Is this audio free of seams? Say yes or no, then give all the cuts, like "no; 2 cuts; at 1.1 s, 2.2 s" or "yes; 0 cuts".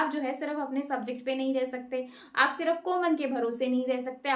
yes; 0 cuts